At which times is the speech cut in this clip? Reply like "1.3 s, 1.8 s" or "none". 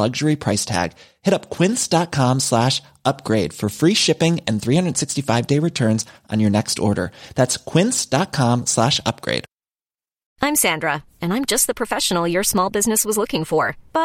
10.2 s